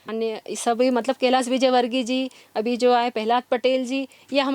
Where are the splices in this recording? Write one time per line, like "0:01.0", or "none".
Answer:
none